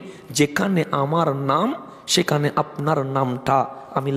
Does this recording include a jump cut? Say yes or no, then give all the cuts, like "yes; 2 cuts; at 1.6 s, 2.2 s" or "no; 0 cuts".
no; 0 cuts